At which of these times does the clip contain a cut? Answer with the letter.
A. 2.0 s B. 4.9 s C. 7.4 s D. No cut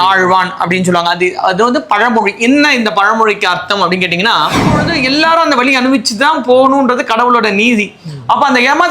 B